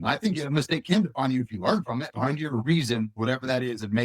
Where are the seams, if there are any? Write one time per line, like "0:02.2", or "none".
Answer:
0:02.1